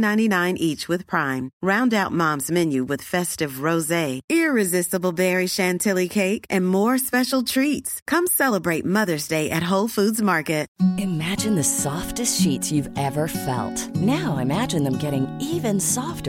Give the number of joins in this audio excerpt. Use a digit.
1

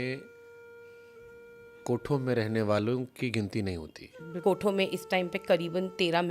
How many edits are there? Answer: 1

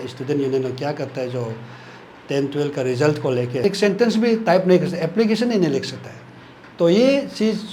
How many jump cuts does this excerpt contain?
1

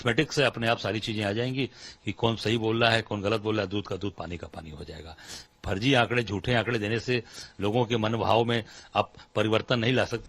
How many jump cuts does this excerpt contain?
1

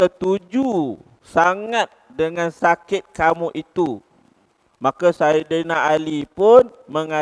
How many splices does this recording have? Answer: 0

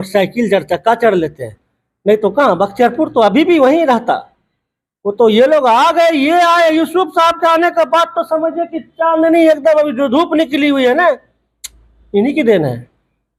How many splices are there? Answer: 0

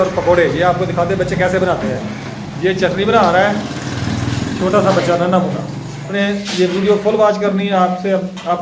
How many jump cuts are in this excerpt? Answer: 1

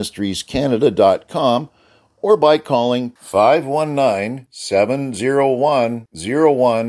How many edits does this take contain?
0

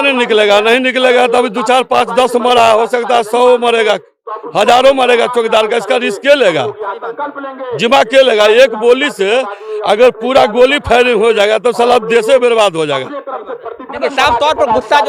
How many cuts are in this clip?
0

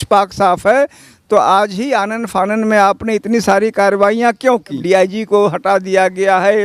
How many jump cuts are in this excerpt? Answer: 1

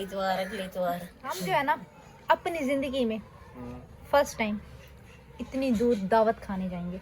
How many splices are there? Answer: 1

